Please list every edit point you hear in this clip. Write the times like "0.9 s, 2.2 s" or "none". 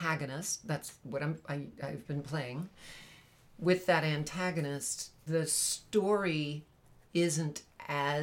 none